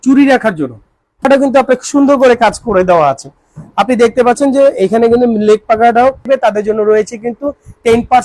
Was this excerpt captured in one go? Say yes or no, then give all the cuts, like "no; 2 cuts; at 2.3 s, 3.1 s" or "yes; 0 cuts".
no; 2 cuts; at 1.3 s, 6.3 s